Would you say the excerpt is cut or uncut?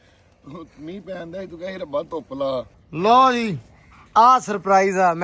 cut